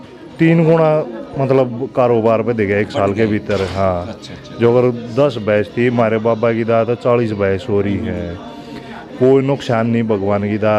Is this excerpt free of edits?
yes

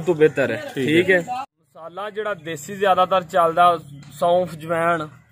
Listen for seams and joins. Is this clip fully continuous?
no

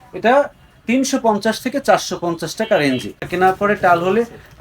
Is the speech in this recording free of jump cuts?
no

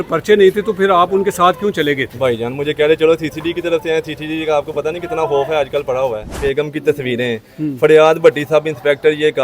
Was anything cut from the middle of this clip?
yes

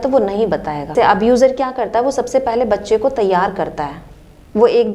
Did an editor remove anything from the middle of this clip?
yes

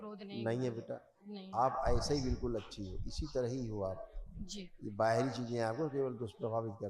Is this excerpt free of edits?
yes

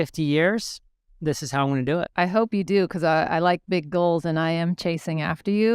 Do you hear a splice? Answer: yes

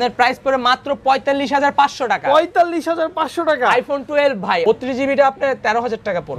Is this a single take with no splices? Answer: no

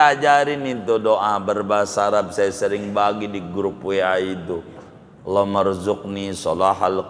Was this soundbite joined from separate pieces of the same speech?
no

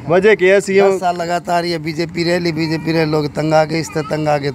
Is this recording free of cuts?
yes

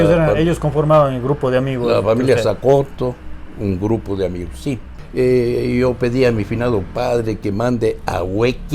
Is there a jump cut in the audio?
yes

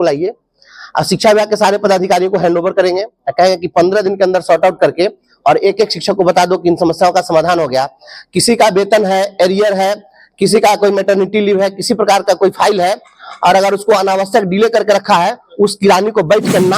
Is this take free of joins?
yes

